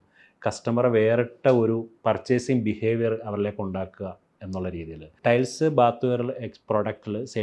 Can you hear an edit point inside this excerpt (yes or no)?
yes